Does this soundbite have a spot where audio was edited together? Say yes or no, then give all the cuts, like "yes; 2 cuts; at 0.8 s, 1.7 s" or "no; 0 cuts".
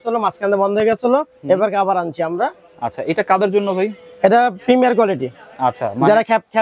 no; 0 cuts